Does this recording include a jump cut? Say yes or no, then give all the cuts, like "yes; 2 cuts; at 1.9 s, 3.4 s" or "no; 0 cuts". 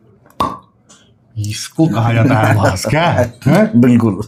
no; 0 cuts